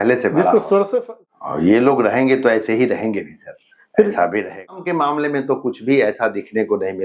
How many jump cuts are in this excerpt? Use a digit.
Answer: 2